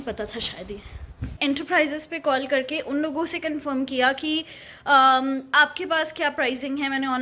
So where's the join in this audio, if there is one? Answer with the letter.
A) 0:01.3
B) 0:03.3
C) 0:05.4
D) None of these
A